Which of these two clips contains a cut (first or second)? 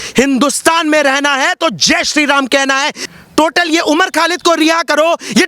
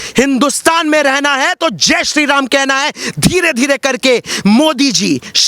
first